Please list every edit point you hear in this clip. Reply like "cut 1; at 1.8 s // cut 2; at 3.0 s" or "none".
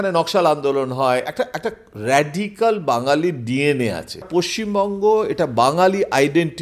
cut 1; at 4.3 s